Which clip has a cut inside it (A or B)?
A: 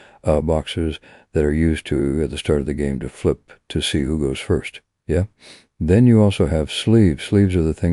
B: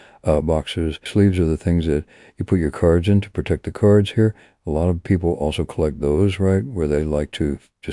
B